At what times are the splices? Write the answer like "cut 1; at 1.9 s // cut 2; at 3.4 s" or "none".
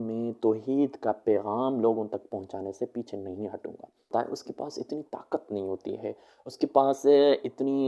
cut 1; at 4.1 s